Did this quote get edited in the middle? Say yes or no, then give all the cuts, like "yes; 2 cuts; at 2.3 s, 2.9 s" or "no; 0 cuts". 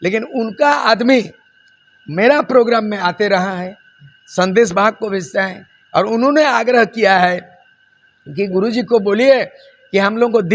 no; 0 cuts